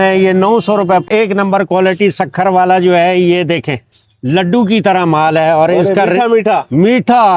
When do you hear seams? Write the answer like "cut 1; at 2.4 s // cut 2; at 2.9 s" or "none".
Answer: cut 1; at 1.0 s